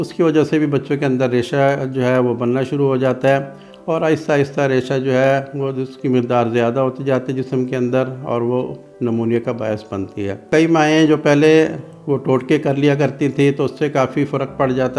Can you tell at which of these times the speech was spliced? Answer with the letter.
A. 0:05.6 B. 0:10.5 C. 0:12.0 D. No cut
B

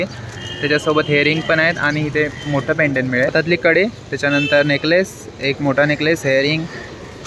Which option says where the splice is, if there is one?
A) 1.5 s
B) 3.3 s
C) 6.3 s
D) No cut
B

